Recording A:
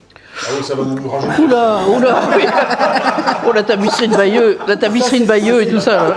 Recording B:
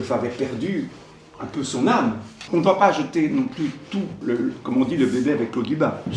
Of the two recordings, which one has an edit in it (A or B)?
B